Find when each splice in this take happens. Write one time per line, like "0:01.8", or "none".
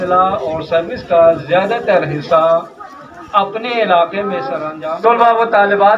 0:04.7